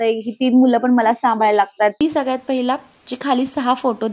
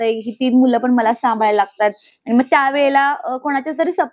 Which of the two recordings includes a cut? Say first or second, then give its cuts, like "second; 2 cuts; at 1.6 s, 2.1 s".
first; 1 cut; at 2.0 s